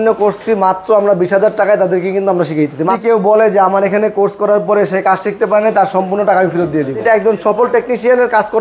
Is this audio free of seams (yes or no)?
no